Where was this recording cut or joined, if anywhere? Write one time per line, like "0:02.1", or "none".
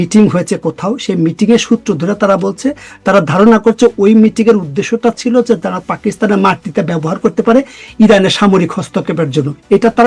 none